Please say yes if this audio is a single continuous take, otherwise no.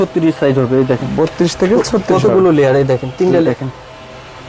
no